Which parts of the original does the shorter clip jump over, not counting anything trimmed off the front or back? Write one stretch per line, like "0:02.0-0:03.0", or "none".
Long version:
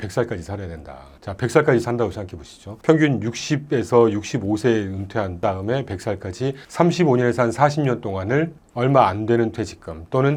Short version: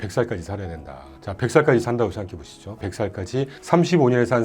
0:02.8-0:05.9